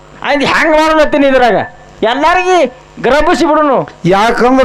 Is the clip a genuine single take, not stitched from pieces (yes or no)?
yes